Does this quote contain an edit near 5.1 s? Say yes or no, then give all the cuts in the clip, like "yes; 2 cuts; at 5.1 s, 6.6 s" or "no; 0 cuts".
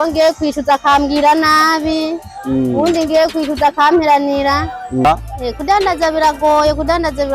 yes; 1 cut; at 5.1 s